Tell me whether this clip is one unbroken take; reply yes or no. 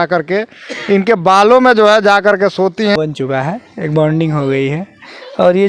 no